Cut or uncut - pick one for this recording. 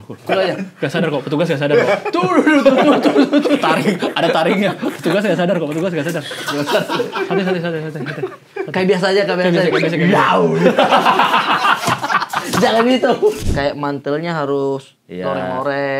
cut